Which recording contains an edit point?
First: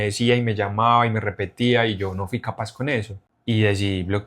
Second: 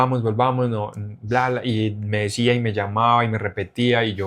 first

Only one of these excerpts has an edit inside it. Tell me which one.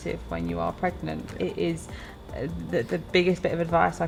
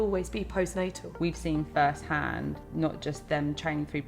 second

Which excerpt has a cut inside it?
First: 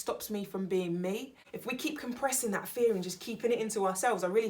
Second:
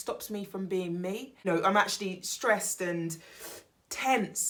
first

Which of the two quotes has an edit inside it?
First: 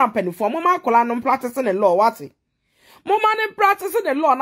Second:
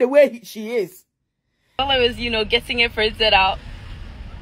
second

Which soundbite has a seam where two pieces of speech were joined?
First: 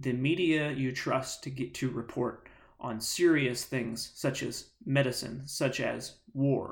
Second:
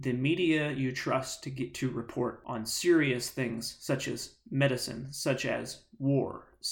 second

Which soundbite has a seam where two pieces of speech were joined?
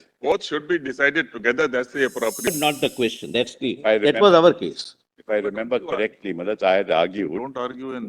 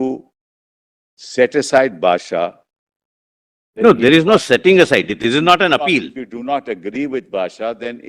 first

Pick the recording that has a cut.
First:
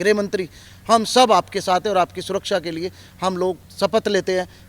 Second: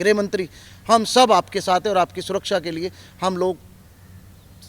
first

